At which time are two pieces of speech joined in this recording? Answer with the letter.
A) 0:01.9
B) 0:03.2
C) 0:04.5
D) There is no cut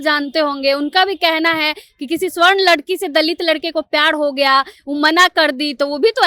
D